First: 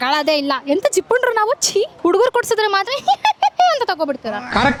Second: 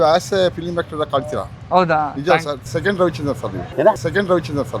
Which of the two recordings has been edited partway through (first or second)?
second